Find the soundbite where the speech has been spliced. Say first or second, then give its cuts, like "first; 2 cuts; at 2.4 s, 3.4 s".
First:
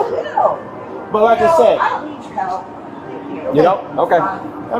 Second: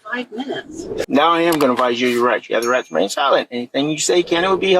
second; 1 cut; at 1.0 s